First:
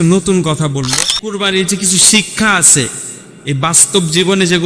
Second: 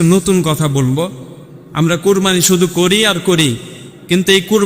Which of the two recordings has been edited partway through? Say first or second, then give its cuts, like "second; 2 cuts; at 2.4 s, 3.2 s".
first; 1 cut; at 1.4 s